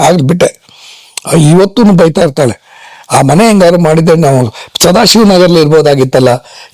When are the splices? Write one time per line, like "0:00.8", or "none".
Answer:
none